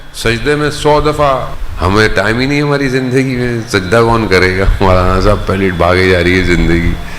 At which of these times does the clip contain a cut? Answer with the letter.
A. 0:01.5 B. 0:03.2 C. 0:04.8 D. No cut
A